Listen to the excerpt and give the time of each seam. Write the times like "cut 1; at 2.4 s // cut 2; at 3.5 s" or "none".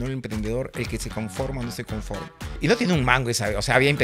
cut 1; at 2.6 s